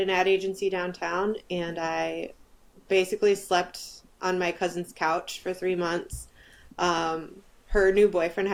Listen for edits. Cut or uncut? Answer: uncut